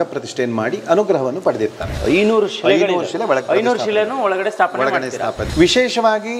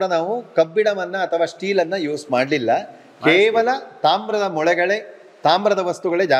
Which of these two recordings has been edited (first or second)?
first